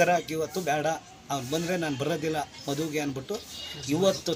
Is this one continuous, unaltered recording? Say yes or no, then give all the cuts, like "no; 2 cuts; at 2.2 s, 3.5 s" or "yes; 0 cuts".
yes; 0 cuts